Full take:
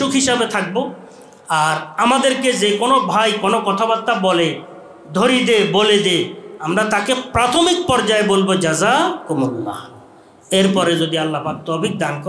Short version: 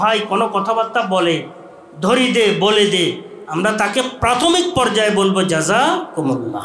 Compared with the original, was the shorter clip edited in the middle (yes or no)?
no